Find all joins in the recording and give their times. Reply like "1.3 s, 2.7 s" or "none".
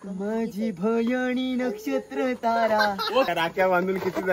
3.3 s